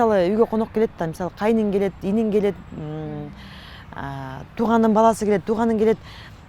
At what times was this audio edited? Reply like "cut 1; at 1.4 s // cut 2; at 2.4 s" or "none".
none